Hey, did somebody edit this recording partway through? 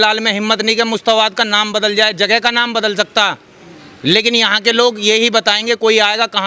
no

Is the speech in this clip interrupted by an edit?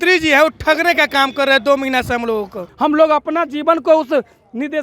yes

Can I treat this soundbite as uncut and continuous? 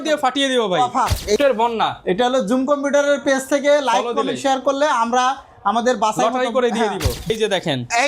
no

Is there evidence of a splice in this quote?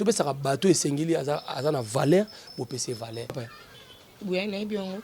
yes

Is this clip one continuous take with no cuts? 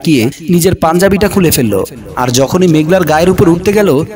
yes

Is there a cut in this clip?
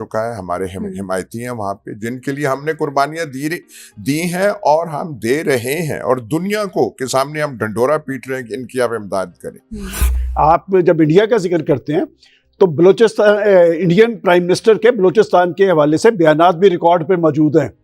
yes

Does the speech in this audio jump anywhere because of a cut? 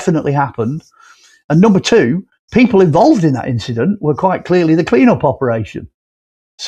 no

